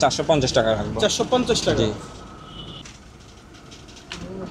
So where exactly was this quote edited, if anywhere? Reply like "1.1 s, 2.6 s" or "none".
none